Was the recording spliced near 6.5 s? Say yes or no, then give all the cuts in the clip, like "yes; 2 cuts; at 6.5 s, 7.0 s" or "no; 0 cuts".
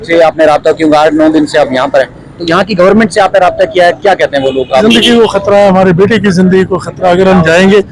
no; 1 cut; at 4.8 s